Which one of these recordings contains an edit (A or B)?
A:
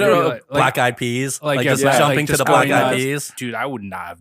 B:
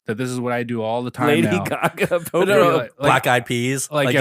A